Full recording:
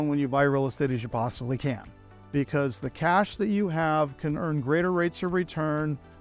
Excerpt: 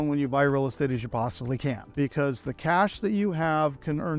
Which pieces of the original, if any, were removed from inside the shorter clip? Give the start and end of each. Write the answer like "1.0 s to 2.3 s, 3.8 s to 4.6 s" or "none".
1.8 s to 2.2 s